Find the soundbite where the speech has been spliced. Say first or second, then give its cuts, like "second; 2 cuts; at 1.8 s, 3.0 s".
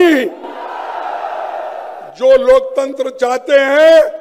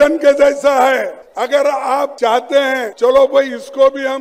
second; 3 cuts; at 1.2 s, 2.1 s, 2.9 s